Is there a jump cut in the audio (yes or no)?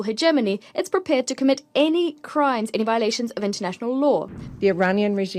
yes